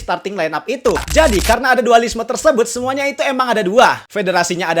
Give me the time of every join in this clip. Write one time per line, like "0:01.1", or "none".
0:01.1